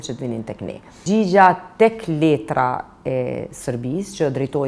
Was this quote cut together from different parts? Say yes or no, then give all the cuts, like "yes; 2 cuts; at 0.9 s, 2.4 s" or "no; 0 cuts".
yes; 1 cut; at 1.0 s